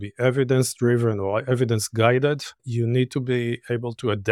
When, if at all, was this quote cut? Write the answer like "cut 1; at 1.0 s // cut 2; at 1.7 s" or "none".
cut 1; at 2.6 s

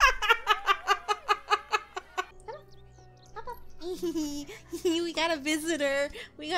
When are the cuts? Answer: cut 1; at 2.3 s

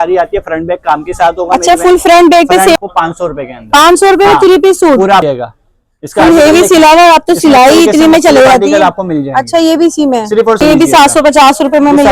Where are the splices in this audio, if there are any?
cut 1; at 2.8 s // cut 2; at 5.3 s // cut 3; at 10.6 s

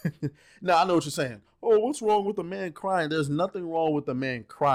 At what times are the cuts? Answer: none

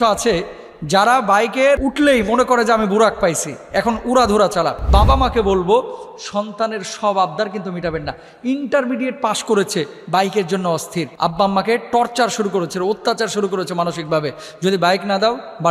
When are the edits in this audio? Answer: cut 1; at 1.8 s // cut 2; at 4.8 s // cut 3; at 11.1 s

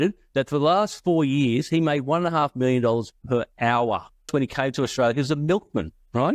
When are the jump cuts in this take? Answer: cut 1; at 4.3 s

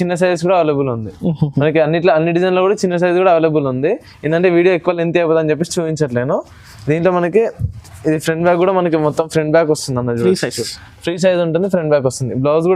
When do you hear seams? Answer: none

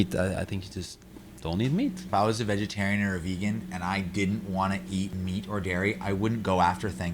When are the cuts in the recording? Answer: cut 1; at 2.1 s // cut 2; at 5.1 s

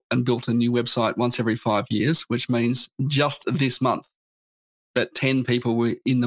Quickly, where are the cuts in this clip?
none

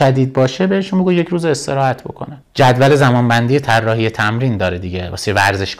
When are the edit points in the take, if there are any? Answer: cut 1; at 2.3 s

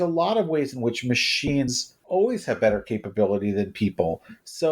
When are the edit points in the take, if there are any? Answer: cut 1; at 1.9 s

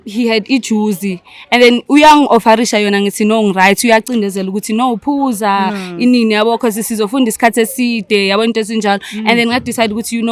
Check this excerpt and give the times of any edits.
none

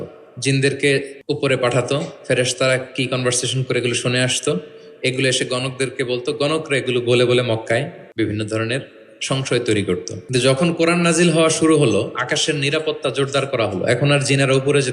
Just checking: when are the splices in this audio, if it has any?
cut 1; at 1.1 s // cut 2; at 8.0 s // cut 3; at 10.1 s

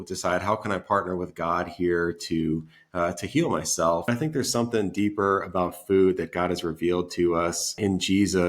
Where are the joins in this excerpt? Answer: cut 1; at 4.1 s // cut 2; at 7.8 s

